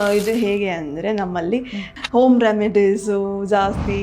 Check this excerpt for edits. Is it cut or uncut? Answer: cut